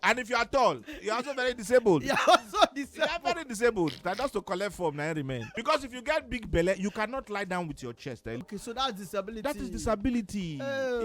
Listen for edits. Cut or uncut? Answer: cut